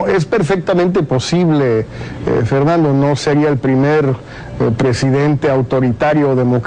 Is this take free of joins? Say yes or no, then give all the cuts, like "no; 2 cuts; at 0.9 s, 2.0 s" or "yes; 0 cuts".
yes; 0 cuts